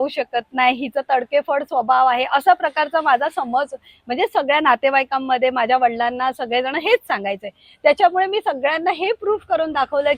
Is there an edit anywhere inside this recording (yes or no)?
no